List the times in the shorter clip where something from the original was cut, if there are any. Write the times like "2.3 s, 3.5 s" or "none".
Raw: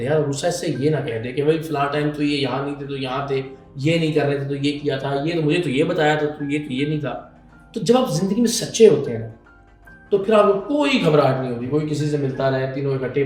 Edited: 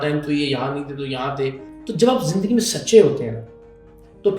1.7 s